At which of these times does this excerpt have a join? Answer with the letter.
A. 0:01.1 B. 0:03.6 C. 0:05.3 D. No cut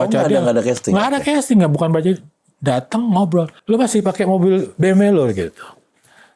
B